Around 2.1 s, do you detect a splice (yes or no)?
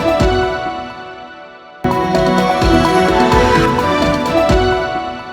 yes